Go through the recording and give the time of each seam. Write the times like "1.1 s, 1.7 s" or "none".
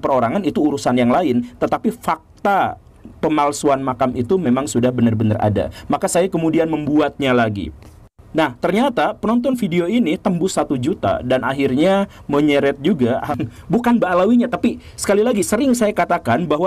13.3 s